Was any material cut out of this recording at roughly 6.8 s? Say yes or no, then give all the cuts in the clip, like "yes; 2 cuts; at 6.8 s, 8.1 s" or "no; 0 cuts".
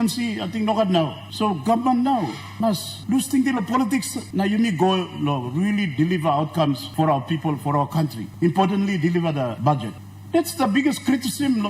yes; 6 cuts; at 1.2 s, 2.6 s, 4.2 s, 6.8 s, 8.2 s, 9.6 s